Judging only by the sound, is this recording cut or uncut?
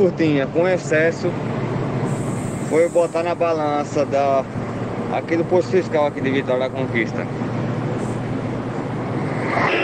uncut